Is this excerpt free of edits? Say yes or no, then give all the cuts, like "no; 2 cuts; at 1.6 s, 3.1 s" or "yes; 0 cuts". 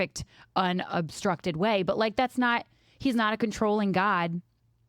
yes; 0 cuts